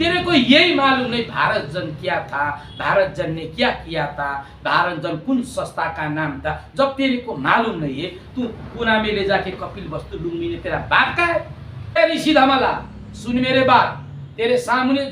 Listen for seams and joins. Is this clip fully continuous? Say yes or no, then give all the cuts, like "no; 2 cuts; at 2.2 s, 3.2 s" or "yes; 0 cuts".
no; 1 cut; at 12.0 s